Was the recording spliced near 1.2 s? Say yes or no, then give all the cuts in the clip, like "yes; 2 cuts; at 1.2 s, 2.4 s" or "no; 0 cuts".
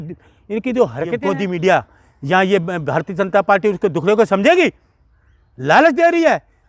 yes; 1 cut; at 1.2 s